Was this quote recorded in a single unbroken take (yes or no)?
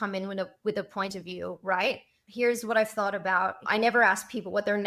no